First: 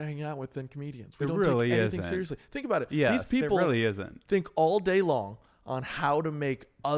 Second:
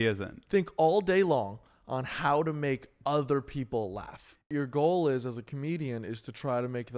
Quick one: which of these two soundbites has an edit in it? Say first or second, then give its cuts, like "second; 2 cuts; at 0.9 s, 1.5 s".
second; 1 cut; at 4.5 s